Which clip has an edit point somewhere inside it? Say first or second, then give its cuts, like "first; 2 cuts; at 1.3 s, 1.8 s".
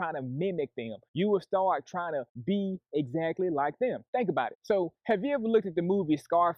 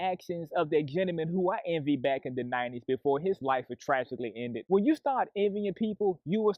second; 1 cut; at 4.6 s